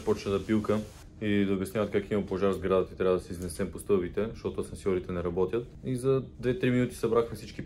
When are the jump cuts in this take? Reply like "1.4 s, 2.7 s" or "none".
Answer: none

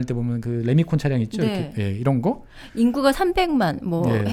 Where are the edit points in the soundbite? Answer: none

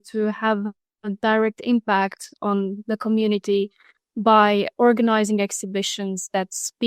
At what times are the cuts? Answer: none

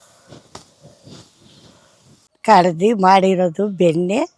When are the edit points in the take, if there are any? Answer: 2.3 s

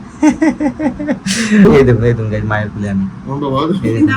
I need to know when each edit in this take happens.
1.7 s

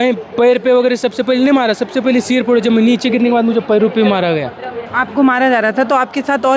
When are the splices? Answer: 4.9 s

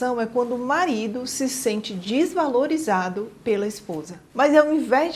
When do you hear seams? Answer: 4.2 s

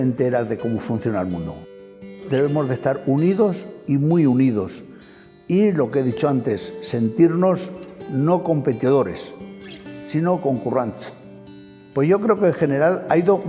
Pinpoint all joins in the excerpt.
2.2 s, 11.6 s

